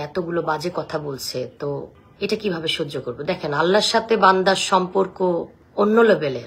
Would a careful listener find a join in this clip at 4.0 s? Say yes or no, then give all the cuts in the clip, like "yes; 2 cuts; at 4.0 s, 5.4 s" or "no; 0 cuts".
no; 2 cuts; at 2.0 s, 5.6 s